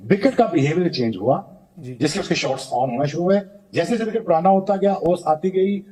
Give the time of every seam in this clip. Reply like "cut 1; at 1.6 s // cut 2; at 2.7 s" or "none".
none

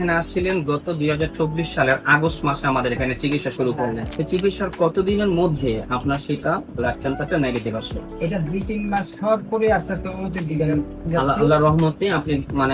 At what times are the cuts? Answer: cut 1; at 4.1 s

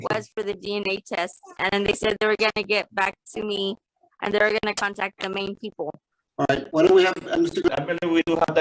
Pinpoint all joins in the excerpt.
cut 1; at 7.7 s

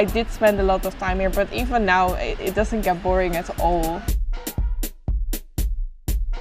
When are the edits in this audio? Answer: none

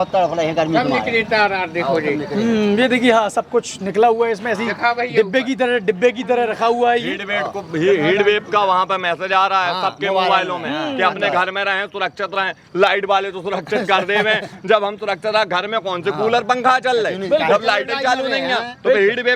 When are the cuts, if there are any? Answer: none

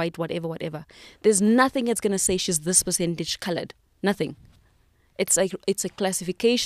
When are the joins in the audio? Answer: none

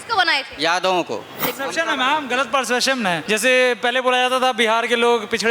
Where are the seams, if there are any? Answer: cut 1; at 1.5 s // cut 2; at 3.2 s

